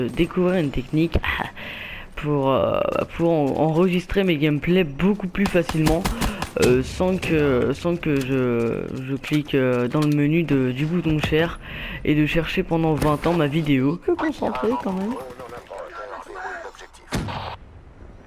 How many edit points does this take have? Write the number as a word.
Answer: zero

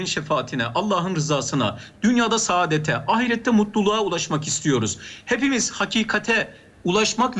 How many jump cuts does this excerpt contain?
zero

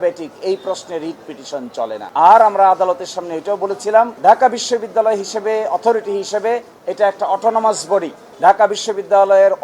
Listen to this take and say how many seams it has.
zero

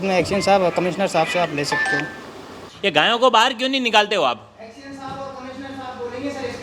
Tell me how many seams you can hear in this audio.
one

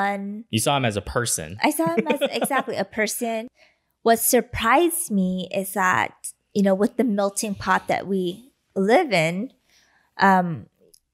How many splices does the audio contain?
one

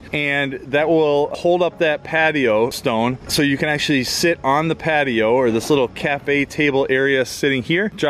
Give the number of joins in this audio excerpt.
zero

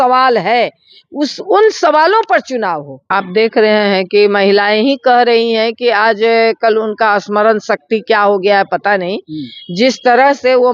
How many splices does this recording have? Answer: one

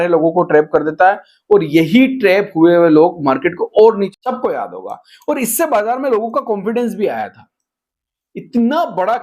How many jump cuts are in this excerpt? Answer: one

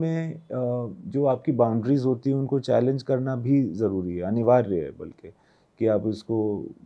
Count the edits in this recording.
zero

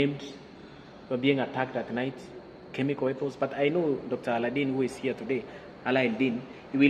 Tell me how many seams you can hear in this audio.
zero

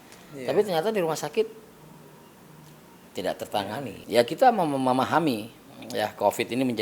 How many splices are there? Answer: one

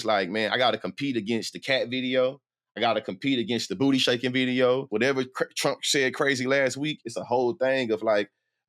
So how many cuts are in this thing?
two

